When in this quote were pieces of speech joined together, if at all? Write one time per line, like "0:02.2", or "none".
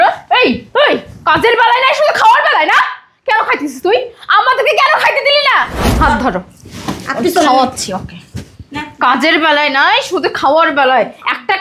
0:05.8